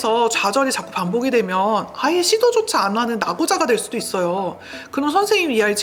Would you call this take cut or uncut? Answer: uncut